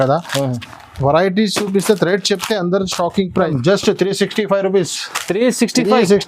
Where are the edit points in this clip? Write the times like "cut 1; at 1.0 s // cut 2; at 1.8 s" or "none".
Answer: cut 1; at 3.5 s